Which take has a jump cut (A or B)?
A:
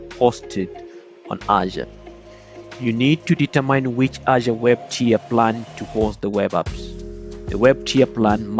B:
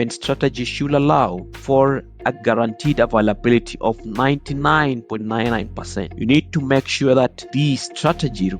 B